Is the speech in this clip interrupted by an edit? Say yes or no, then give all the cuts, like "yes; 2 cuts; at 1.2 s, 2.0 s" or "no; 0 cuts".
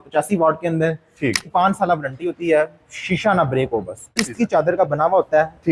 yes; 2 cuts; at 1.5 s, 4.2 s